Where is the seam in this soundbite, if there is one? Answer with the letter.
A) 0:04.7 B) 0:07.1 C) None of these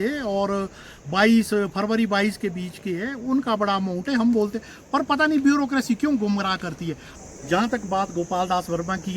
B